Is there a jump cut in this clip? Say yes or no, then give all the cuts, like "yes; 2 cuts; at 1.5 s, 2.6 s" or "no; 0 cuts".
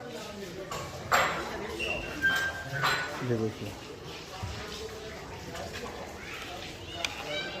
no; 0 cuts